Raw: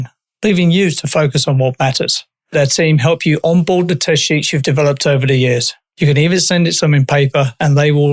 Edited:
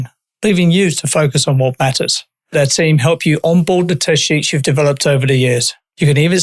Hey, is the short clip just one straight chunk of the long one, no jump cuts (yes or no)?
yes